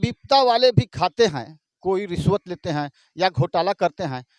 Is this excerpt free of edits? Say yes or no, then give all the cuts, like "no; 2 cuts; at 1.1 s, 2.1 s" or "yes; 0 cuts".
yes; 0 cuts